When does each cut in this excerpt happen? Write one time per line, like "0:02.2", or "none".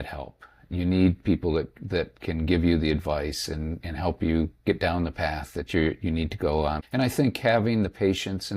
0:06.8